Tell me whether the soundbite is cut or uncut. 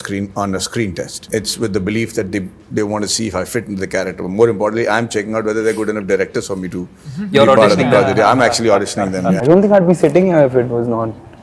cut